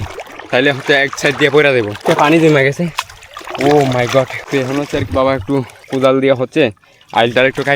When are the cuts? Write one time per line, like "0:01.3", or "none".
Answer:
0:02.0
0:04.4